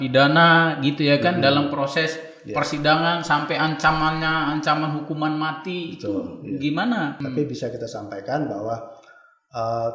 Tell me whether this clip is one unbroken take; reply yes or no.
no